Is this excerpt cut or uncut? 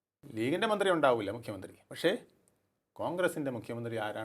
uncut